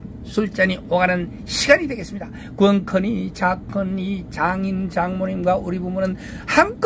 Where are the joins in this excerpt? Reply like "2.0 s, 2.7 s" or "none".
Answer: none